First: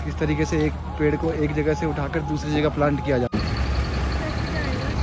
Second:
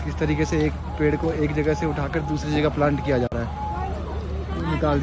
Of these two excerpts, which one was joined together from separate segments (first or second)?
first